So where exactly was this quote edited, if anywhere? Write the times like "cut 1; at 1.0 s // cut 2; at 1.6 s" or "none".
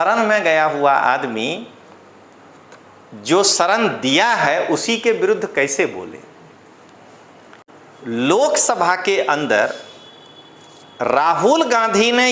cut 1; at 7.7 s

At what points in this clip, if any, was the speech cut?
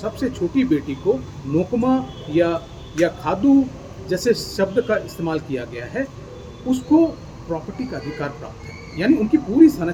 none

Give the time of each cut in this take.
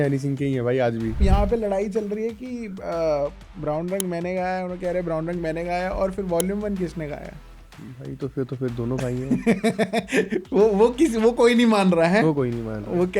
cut 1; at 1.2 s

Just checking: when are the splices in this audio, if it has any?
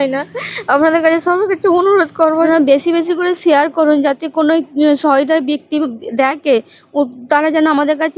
cut 1; at 2.5 s

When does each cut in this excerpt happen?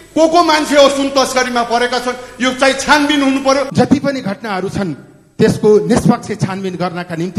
cut 1; at 3.7 s

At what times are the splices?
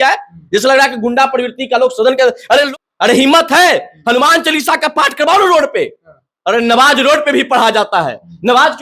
cut 1; at 2.7 s

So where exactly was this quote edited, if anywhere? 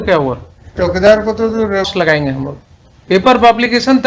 cut 1; at 1.9 s

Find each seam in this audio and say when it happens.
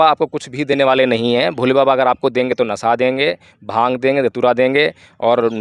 none

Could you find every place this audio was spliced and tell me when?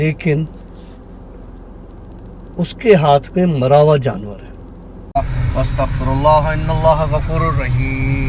cut 1; at 5.0 s

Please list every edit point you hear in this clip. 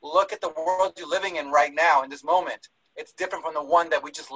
none

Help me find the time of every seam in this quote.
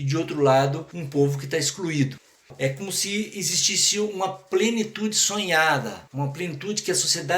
cut 1; at 2.4 s

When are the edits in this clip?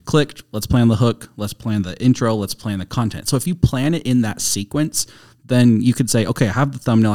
none

